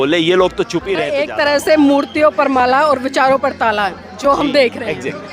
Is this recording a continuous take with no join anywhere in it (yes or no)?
no